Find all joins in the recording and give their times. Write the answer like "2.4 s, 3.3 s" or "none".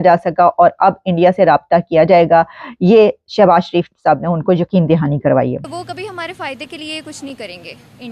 5.7 s

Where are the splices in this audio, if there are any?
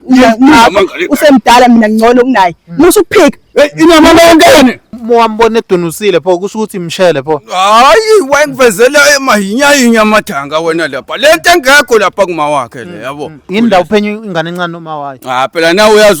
4.9 s, 13.4 s

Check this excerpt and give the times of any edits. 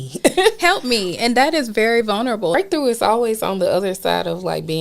2.5 s

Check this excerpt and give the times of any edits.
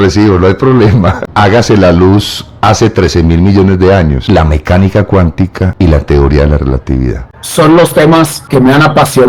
1.2 s, 4.2 s, 5.6 s, 7.4 s, 8.4 s

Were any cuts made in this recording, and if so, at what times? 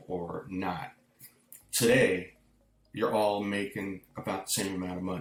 none

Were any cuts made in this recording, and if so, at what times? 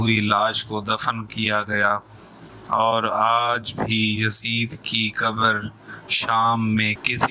none

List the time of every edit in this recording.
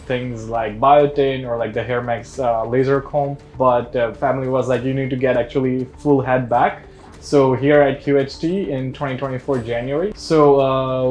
10.2 s

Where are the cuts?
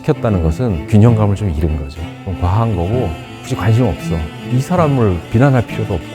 0.8 s, 3.3 s

